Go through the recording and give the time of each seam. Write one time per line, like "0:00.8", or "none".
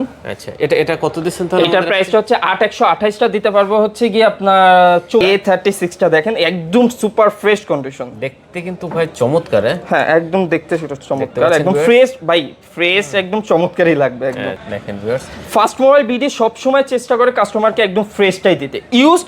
0:05.2
0:14.5